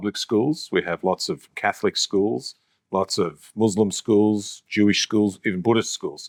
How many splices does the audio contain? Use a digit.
0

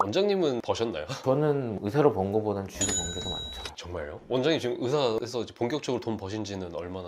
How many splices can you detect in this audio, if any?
1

